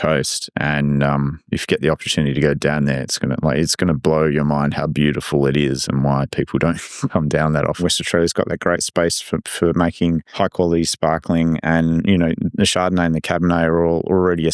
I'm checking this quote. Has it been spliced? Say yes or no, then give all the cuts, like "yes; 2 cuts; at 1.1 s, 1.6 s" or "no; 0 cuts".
yes; 2 cuts; at 7.8 s, 10.3 s